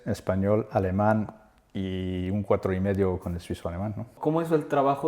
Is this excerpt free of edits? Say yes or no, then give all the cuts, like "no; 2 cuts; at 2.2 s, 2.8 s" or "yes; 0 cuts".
no; 1 cut; at 4.1 s